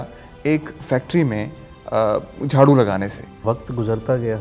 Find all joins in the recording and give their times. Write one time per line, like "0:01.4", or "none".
0:03.4